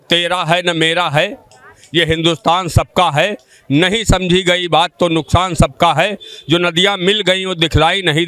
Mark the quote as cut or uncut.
uncut